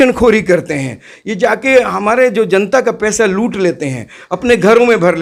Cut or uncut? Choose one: uncut